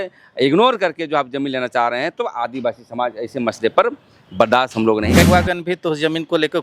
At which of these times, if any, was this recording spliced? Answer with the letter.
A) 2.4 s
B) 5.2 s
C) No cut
B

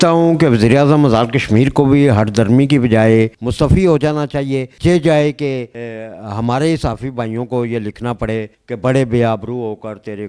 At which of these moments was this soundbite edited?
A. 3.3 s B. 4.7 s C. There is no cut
A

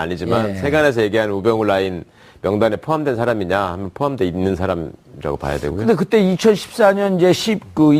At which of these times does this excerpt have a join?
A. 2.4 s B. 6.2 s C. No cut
B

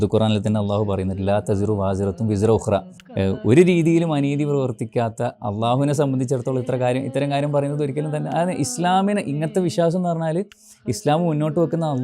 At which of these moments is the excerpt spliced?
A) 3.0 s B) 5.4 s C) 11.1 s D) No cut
A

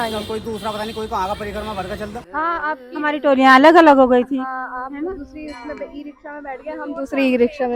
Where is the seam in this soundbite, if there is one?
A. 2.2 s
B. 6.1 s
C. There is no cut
A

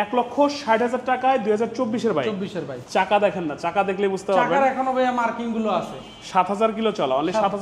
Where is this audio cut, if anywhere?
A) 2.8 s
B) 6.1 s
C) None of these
A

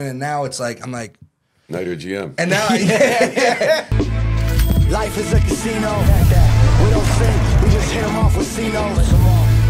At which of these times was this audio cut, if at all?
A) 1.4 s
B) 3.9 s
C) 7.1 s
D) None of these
B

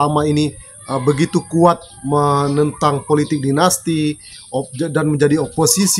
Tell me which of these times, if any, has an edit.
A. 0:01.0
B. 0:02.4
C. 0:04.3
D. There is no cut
D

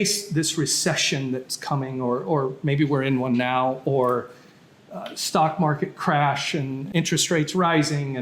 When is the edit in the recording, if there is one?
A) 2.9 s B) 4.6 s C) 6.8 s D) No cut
C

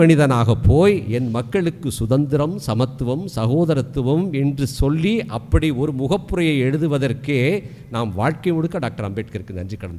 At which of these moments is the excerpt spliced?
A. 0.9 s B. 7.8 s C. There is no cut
C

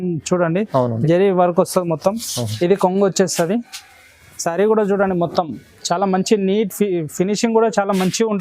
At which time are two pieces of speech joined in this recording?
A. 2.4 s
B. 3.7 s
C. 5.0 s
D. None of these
A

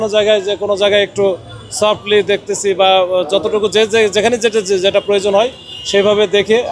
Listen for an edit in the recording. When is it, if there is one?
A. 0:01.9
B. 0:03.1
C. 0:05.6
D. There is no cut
D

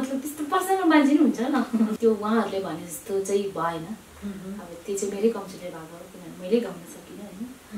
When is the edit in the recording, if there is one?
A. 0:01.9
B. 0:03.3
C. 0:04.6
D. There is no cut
A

